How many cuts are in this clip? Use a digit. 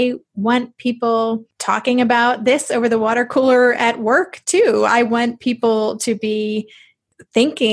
1